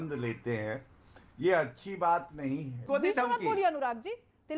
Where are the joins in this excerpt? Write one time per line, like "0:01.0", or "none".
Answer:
0:02.8